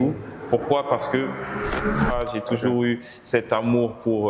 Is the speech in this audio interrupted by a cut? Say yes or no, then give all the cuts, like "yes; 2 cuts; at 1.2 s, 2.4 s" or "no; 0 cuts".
yes; 1 cut; at 2.1 s